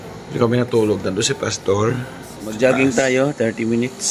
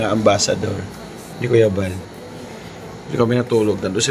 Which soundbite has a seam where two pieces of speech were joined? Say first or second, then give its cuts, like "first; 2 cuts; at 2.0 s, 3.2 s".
first; 1 cut; at 2.6 s